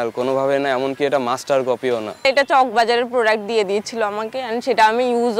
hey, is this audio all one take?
no; 1 cut; at 2.2 s

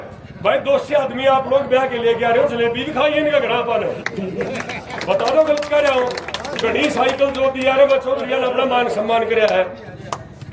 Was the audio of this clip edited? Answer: no; 0 cuts

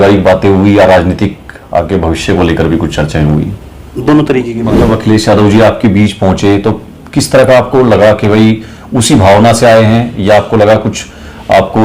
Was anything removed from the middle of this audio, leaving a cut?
yes; 1 cut; at 4.6 s

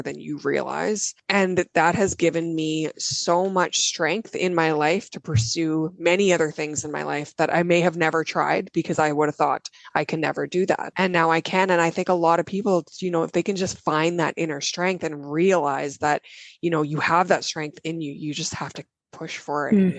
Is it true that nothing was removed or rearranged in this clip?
no; 2 cuts; at 1.1 s, 10.9 s

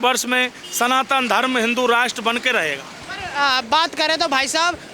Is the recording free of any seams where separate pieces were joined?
yes; 0 cuts

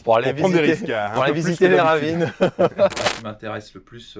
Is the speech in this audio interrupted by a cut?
yes; 1 cut; at 3.1 s

